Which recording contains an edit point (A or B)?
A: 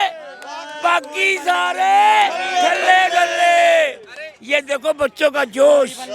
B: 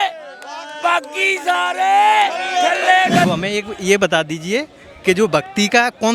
B